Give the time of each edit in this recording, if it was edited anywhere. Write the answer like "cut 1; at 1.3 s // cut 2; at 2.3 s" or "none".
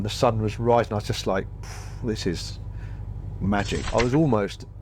cut 1; at 3.8 s